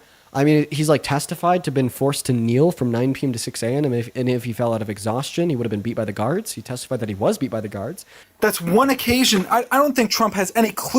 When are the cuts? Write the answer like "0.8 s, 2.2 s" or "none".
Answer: 8.2 s